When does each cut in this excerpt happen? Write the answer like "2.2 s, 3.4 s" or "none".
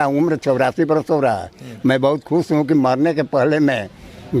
none